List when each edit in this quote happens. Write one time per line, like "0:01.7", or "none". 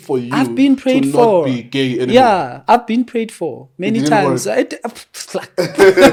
none

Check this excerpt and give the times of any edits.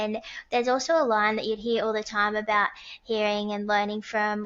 none

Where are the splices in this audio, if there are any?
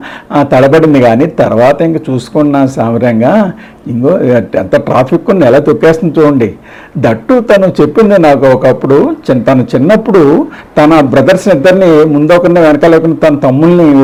none

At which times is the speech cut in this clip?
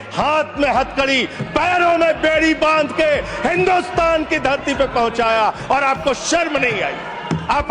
none

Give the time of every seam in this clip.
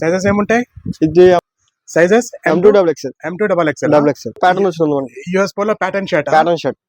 0:04.4

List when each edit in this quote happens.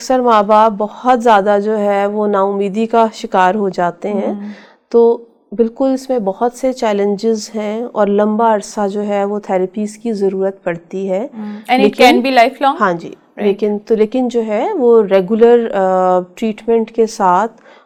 none

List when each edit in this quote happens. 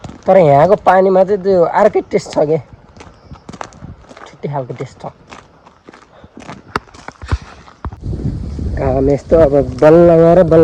0:08.0

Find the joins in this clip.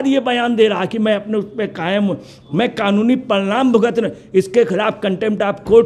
none

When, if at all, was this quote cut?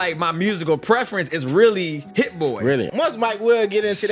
0:02.0
0:02.9

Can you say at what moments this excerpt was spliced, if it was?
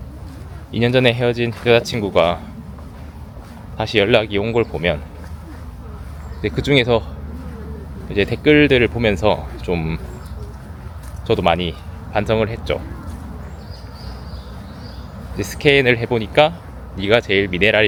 none

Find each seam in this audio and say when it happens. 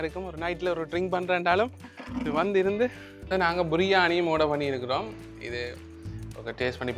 0:03.1

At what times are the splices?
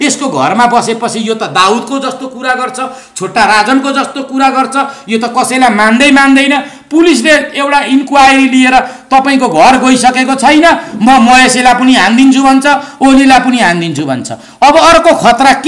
none

